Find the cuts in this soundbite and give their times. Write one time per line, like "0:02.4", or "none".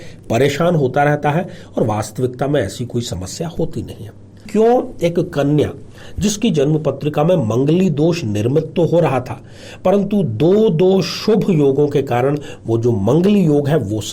0:04.4